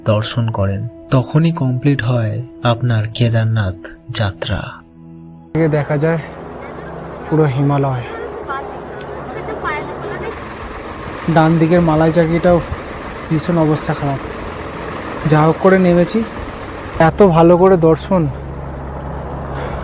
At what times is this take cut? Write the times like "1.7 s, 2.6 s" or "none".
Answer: 5.6 s, 10.3 s, 17.0 s